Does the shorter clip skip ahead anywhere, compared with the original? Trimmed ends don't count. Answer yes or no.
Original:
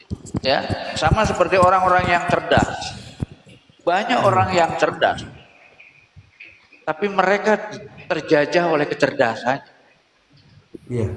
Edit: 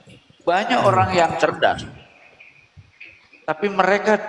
no